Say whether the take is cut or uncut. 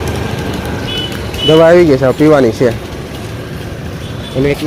uncut